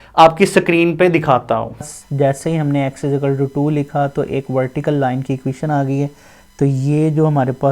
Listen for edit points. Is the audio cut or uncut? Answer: cut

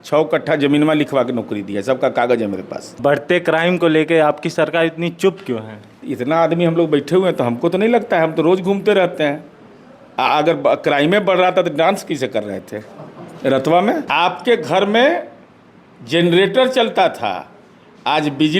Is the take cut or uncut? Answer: cut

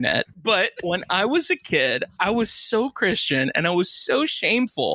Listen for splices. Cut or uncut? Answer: cut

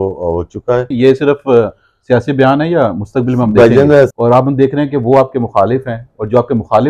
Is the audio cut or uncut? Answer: cut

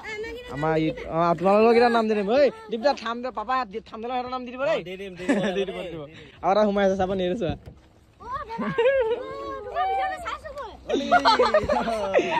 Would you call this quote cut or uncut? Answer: uncut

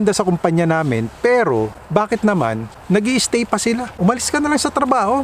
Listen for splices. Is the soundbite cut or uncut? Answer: cut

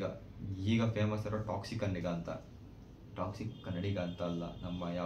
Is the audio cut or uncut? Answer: uncut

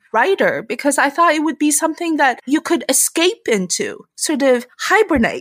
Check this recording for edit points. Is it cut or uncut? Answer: cut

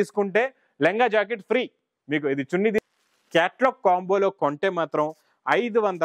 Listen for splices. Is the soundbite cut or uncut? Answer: cut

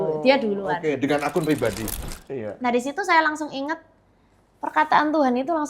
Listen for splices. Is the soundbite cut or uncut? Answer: cut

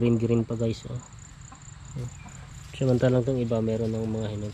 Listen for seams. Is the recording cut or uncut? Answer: uncut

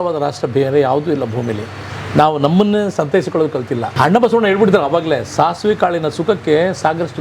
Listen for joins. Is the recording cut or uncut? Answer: cut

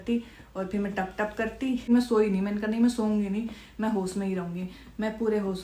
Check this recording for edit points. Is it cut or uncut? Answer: cut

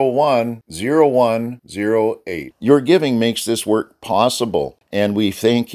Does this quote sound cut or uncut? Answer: cut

